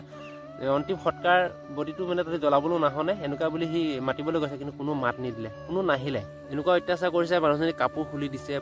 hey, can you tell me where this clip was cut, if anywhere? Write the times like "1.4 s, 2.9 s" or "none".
6.4 s